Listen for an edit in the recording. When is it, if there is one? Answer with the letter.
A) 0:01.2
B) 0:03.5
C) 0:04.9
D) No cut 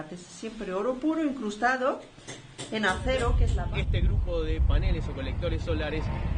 B